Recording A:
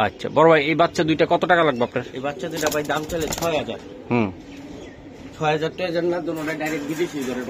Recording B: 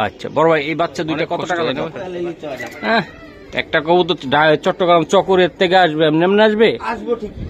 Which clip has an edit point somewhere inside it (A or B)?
B